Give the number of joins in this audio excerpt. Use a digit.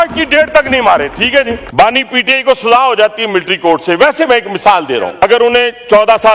2